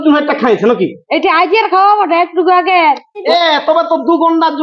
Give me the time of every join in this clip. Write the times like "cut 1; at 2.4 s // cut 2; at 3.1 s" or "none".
cut 1; at 3.2 s